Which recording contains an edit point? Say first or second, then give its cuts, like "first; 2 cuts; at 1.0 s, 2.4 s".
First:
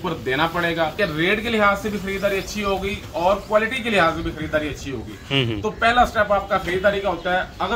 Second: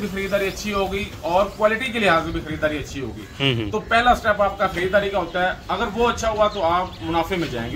first; 1 cut; at 0.9 s